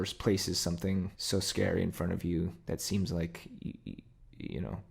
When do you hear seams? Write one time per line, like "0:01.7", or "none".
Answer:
0:01.2